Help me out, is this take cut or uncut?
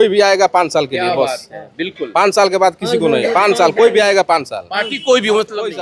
uncut